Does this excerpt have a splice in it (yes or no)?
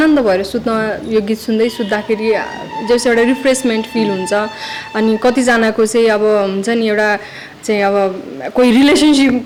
no